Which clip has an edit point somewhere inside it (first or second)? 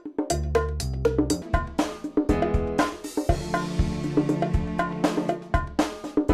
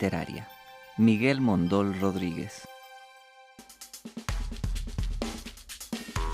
second